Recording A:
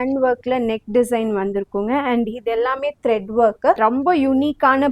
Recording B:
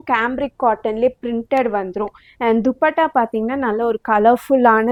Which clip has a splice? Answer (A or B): A